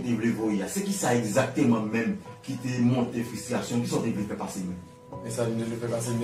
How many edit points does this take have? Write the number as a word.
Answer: zero